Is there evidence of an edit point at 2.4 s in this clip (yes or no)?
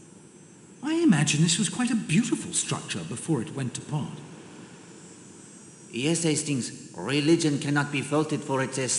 no